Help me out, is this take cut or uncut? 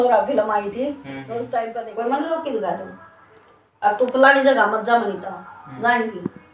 cut